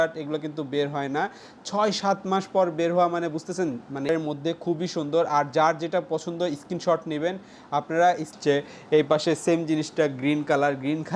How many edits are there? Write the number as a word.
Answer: two